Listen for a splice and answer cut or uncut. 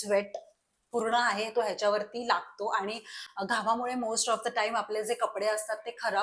uncut